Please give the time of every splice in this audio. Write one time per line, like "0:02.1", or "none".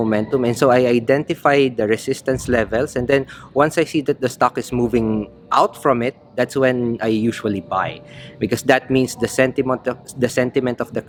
none